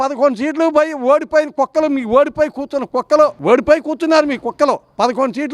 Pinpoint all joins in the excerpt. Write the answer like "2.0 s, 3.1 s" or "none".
3.4 s